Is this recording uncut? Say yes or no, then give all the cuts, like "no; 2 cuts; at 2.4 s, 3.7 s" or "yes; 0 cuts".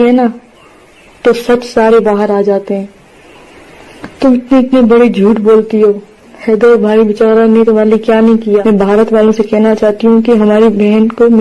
no; 1 cut; at 8.6 s